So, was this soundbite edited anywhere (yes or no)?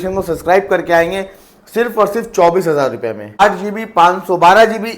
yes